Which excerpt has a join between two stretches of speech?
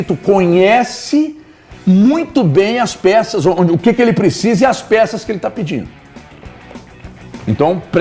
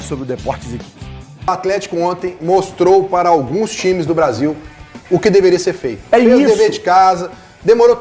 second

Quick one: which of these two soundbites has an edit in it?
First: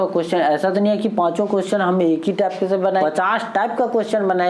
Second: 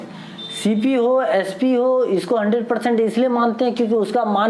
first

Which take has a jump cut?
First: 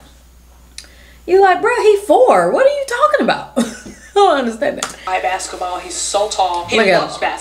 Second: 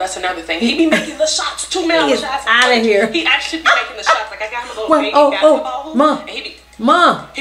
first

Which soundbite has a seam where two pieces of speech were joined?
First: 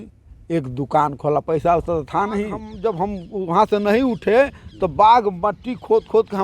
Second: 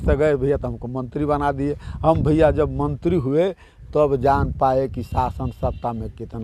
first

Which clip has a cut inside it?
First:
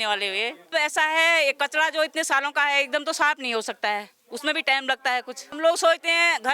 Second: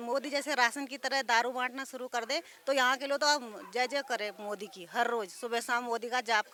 first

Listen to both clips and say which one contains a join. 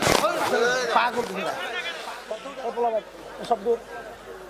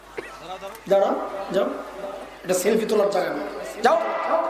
first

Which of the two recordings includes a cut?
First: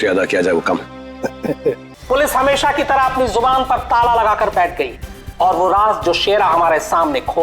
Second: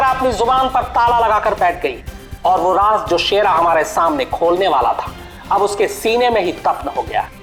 first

